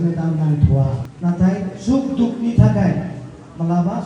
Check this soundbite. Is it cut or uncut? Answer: cut